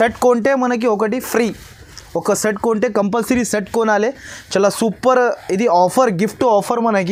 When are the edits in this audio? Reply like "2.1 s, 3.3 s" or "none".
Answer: none